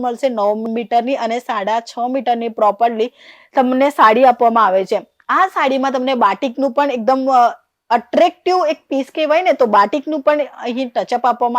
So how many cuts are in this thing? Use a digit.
0